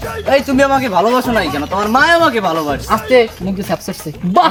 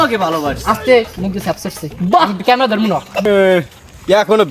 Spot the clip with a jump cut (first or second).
second